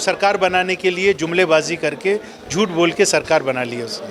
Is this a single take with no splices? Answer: yes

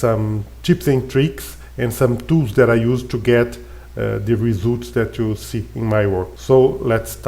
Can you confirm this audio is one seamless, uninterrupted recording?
no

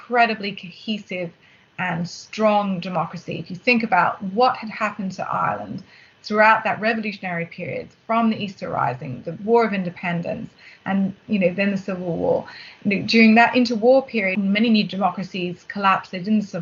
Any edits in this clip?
yes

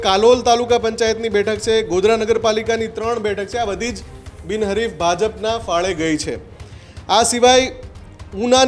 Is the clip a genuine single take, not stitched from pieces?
yes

